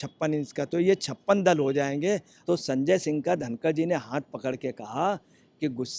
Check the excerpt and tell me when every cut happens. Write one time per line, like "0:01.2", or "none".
0:02.3